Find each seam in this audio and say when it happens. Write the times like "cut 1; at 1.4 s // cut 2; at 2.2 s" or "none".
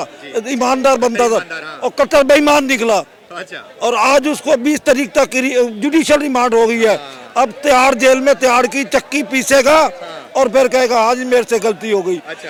none